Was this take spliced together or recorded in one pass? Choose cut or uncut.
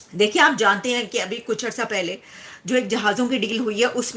uncut